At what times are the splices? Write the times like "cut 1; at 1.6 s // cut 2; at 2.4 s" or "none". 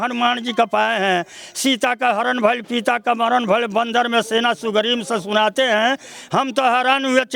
none